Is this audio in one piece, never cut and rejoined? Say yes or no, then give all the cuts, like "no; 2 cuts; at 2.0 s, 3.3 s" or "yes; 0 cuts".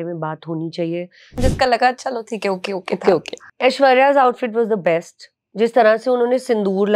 no; 1 cut; at 1.4 s